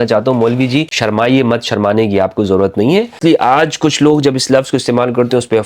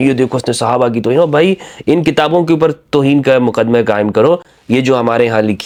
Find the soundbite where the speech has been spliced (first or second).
first